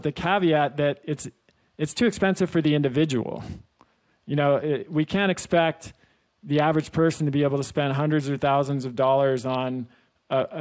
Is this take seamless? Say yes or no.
yes